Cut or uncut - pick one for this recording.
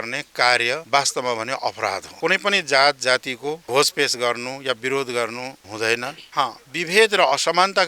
uncut